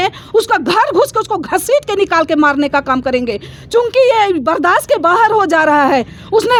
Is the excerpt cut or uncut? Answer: uncut